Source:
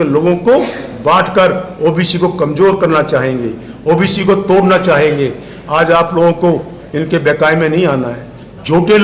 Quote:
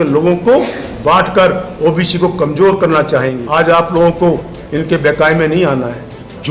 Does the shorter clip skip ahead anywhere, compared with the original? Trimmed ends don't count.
yes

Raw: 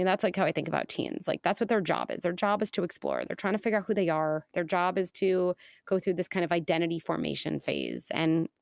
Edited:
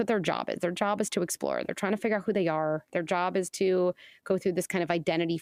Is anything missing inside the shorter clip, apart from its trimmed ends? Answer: no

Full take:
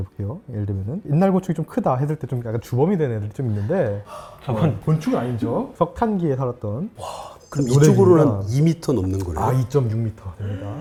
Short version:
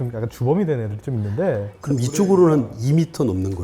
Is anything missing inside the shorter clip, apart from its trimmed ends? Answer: yes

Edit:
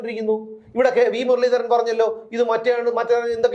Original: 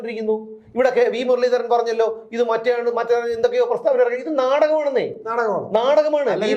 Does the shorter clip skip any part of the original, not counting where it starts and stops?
no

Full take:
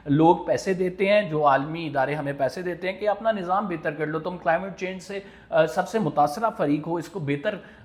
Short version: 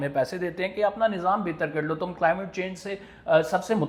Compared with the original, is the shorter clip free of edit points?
yes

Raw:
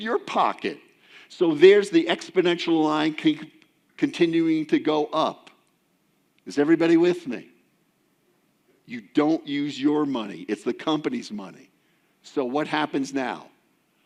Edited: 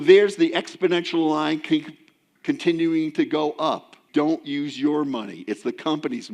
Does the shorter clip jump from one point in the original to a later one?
yes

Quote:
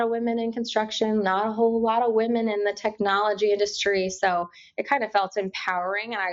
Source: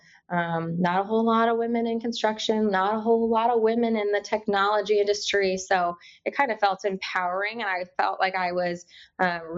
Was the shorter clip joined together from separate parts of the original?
no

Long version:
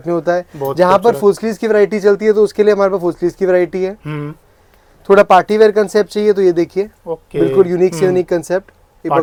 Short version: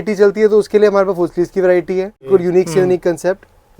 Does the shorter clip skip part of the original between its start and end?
yes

